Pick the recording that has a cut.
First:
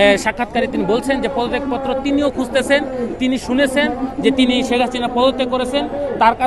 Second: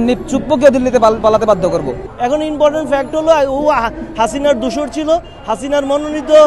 second; 1 cut; at 2.0 s

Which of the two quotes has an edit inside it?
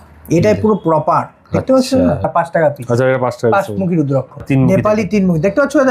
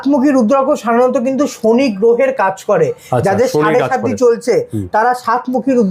first; 2 cuts; at 2.3 s, 4.4 s

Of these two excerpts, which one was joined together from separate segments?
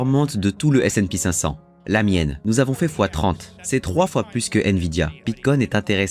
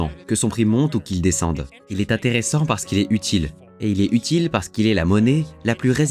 first; 3 cuts; at 2.4 s, 3.5 s, 5.2 s

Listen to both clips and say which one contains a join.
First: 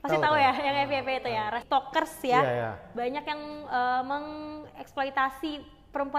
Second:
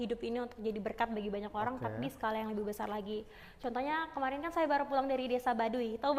first; 1 cut; at 1.6 s

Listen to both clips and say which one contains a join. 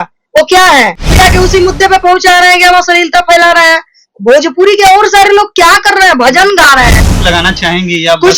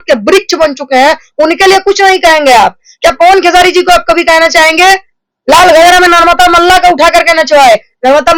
first; 2 cuts; at 1.1 s, 7.0 s

